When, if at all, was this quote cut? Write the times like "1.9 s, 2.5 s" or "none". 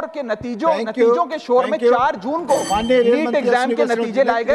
none